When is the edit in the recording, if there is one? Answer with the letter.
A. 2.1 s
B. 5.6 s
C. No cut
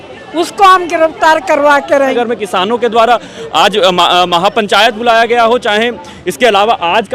A